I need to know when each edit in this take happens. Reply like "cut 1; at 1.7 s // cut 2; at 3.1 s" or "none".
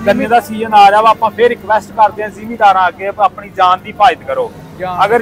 none

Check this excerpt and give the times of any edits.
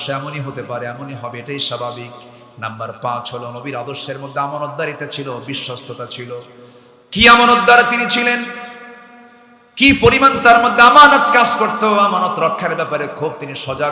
none

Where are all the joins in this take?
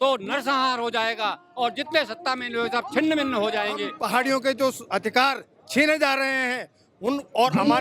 cut 1; at 4.0 s

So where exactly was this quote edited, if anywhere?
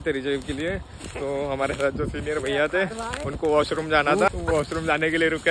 cut 1; at 4.3 s

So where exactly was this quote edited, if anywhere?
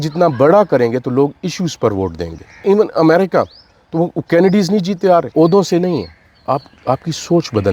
cut 1; at 2.6 s // cut 2; at 5.3 s

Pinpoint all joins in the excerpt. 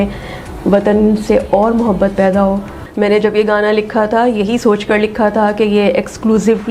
cut 1; at 2.8 s

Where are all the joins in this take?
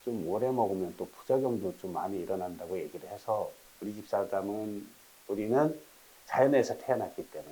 cut 1; at 3.6 s // cut 2; at 5.1 s

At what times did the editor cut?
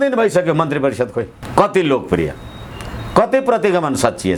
none

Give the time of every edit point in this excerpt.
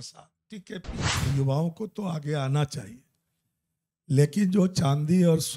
cut 1; at 1.1 s

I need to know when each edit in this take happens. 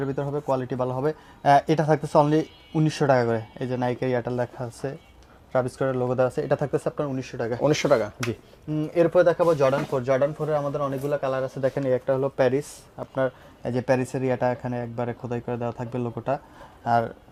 none

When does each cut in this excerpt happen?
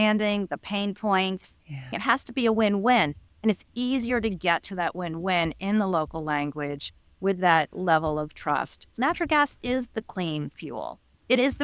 cut 1; at 1.9 s // cut 2; at 8.9 s

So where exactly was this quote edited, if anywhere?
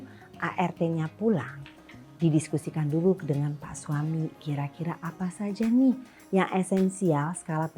none

